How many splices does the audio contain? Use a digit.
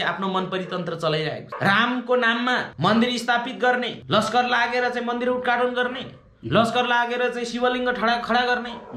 3